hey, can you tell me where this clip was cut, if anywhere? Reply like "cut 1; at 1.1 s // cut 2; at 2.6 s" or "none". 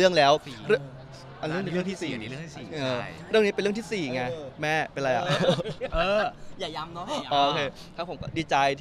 none